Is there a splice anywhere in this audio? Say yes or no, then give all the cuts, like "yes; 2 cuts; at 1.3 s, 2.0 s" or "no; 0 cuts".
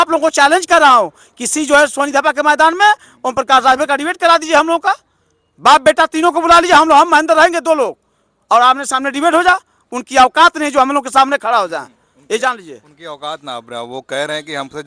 no; 0 cuts